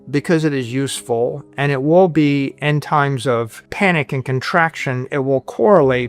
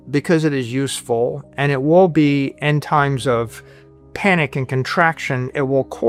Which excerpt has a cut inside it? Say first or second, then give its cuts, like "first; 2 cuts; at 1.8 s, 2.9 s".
first; 1 cut; at 3.6 s